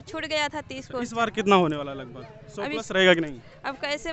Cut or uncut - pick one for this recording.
uncut